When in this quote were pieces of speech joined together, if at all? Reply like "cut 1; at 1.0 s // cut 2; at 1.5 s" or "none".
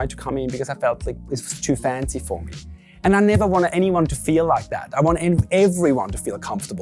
none